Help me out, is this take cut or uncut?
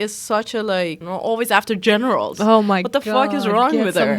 cut